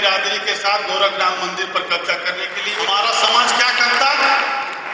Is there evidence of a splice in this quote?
yes; 1 cut; at 2.8 s

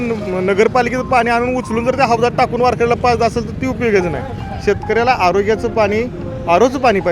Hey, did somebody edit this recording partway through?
no; 0 cuts

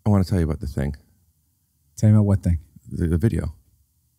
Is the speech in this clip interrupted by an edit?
no; 0 cuts

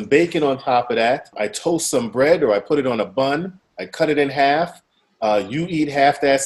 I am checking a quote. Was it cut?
yes; 1 cut; at 1.3 s

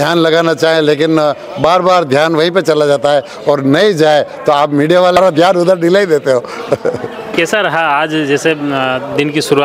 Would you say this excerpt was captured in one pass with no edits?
yes; 0 cuts

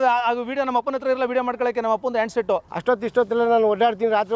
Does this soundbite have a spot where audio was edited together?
yes; 1 cut; at 2.7 s

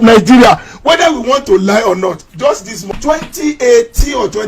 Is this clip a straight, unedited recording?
no; 1 cut; at 3.2 s

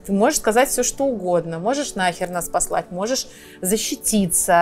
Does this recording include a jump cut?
no; 0 cuts

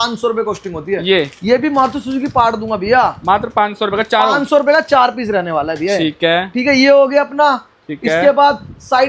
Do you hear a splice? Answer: no; 0 cuts

